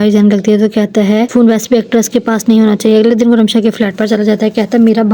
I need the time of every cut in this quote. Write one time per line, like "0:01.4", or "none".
0:01.3